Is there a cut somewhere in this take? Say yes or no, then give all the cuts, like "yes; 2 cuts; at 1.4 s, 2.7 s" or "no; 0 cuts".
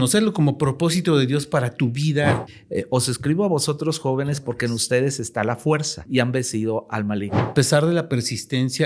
yes; 3 cuts; at 2.5 s, 6.0 s, 7.5 s